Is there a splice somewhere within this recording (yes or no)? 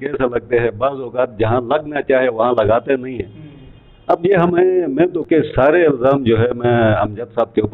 yes